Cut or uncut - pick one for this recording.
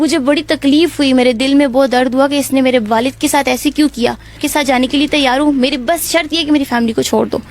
cut